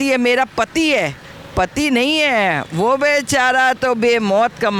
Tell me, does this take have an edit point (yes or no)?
no